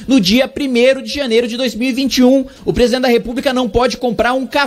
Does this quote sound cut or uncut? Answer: cut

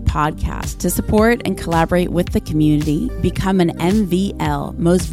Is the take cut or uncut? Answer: uncut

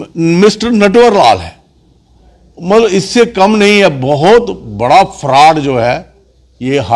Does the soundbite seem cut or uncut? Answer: uncut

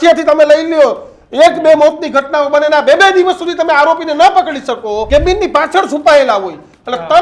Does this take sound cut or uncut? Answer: cut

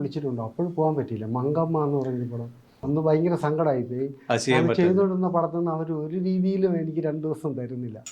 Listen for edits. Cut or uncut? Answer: cut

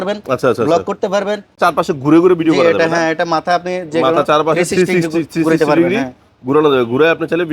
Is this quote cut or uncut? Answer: cut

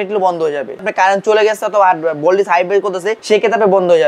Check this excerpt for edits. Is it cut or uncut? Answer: cut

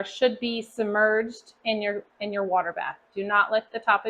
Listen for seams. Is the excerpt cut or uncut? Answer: uncut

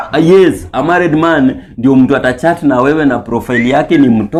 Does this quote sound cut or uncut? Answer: uncut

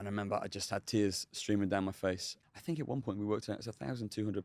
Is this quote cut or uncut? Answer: cut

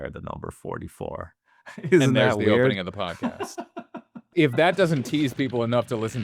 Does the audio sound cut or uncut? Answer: cut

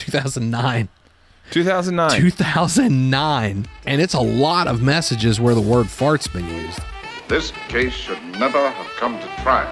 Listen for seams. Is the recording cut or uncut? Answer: cut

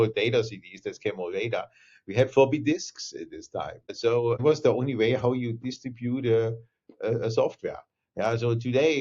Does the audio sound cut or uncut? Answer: cut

